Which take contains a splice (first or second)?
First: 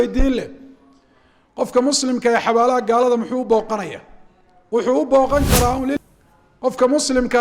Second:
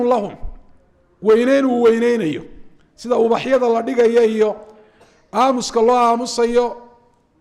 first